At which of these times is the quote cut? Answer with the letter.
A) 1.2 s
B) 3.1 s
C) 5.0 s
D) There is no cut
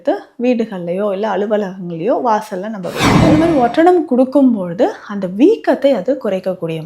B